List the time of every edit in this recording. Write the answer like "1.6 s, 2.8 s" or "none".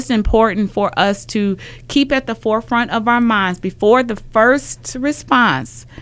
none